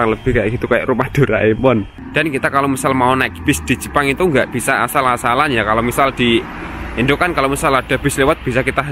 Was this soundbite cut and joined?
yes; 1 cut; at 2.0 s

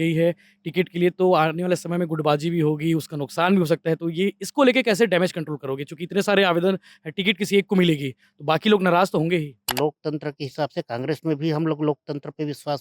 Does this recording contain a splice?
yes; 1 cut; at 9.7 s

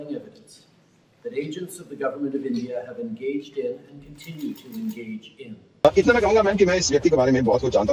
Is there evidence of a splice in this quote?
yes; 1 cut; at 5.6 s

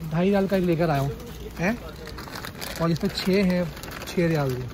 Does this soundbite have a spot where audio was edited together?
no; 0 cuts

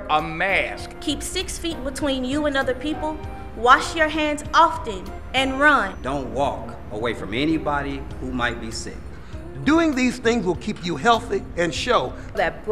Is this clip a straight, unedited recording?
yes; 0 cuts

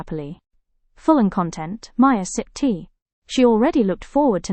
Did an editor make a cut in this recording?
no; 0 cuts

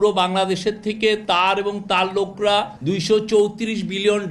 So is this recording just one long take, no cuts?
yes; 0 cuts

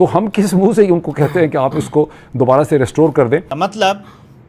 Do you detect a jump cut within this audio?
yes; 1 cut; at 3.5 s

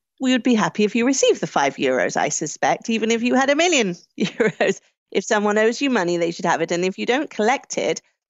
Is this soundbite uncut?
yes; 0 cuts

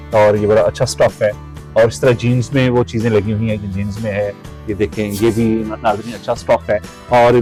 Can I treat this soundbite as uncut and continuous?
yes; 0 cuts

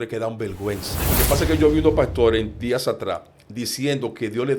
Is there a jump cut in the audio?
yes; 1 cut; at 1.0 s

